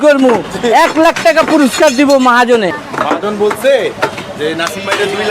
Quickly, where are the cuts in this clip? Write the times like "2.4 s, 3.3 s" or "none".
2.8 s